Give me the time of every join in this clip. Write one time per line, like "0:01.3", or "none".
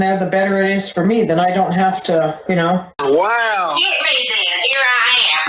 0:02.9